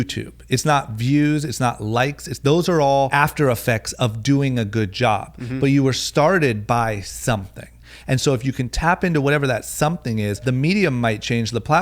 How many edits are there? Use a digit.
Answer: 2